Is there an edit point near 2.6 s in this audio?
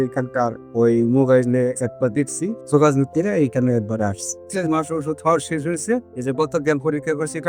yes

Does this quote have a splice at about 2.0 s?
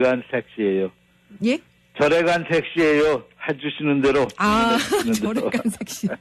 no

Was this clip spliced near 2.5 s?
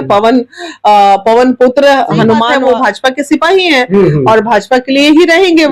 yes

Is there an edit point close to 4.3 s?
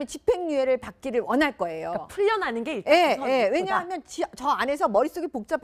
yes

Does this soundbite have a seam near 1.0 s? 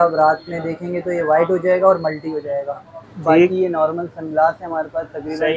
no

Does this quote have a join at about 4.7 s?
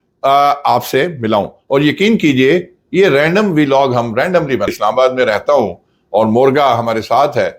yes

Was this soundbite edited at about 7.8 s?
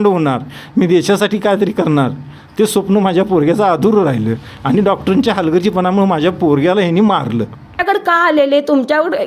yes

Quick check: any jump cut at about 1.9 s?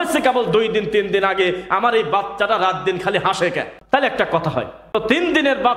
no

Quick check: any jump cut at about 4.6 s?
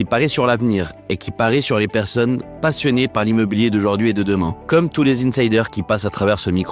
yes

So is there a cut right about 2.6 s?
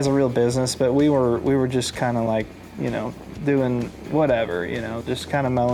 no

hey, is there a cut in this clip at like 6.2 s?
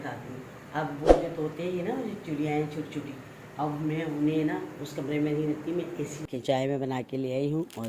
yes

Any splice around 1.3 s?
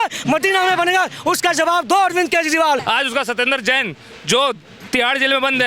no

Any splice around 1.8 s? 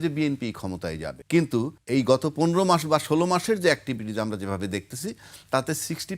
yes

